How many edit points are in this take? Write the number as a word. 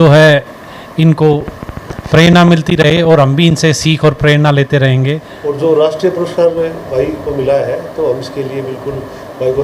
one